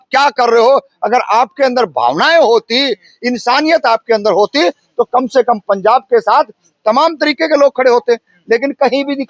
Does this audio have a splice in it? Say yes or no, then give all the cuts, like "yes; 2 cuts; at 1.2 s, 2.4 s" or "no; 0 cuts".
no; 0 cuts